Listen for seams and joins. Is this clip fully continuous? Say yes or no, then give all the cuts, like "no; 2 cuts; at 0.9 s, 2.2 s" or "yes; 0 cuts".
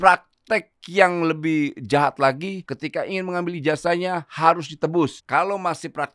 no; 2 cuts; at 2.7 s, 5.1 s